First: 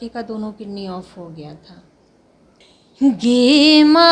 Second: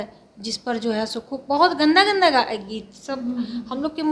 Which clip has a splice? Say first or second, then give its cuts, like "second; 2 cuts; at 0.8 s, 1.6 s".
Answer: first; 1 cut; at 2.5 s